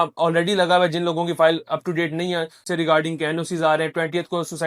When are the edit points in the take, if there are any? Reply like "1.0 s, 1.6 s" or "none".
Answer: 2.6 s